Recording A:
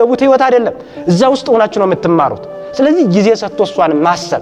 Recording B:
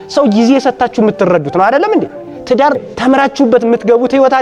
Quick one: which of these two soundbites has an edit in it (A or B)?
B